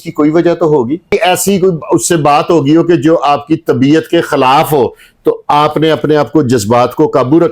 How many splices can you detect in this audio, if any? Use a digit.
1